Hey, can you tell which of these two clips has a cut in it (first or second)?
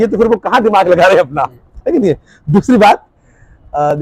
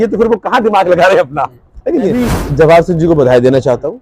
second